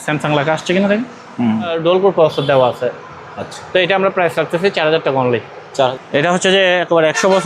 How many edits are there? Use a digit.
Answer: 2